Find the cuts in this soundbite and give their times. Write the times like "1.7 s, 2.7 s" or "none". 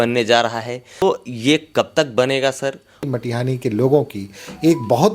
1.0 s, 3.0 s